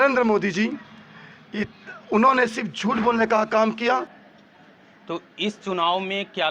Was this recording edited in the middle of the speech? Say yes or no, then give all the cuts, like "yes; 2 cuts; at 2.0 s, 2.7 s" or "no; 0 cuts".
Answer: yes; 1 cut; at 4.2 s